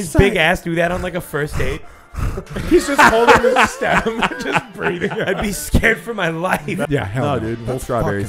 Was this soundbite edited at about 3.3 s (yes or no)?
no